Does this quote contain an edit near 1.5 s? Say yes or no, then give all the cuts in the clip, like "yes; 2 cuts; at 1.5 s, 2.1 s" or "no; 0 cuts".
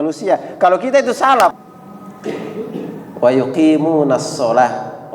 yes; 1 cut; at 1.5 s